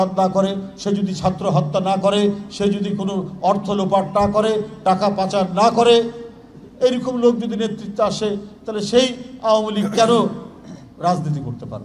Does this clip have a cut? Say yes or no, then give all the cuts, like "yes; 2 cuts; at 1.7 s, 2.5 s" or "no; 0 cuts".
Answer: no; 0 cuts